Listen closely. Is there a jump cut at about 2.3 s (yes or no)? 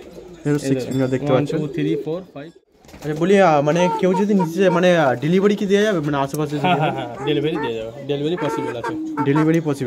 yes